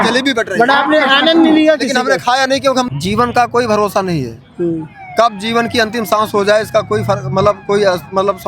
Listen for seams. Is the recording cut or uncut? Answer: cut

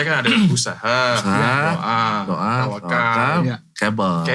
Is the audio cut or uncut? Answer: uncut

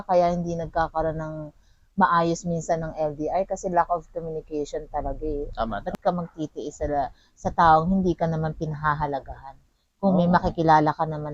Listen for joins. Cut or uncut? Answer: cut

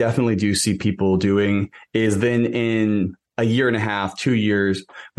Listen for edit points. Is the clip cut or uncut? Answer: uncut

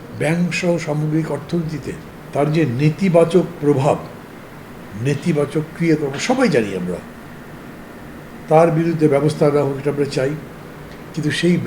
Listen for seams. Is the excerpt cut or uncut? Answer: cut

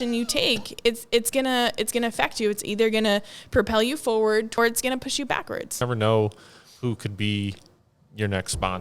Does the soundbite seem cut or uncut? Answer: cut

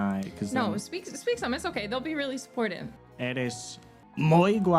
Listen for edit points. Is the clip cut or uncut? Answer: cut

